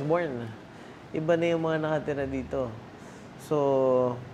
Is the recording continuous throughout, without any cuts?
yes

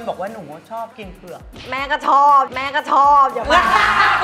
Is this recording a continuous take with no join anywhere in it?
no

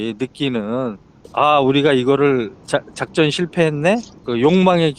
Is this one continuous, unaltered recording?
no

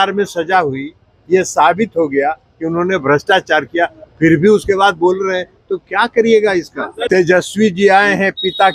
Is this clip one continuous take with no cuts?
no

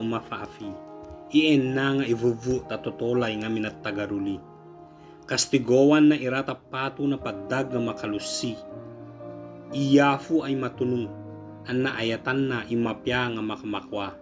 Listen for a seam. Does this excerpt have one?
no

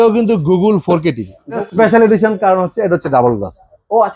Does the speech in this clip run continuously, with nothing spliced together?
no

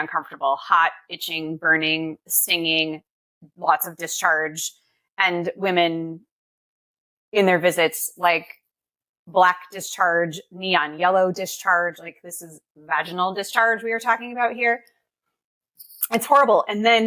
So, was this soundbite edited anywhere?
yes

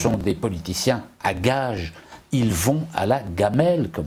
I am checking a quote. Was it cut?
no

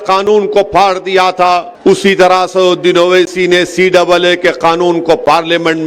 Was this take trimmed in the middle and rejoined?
yes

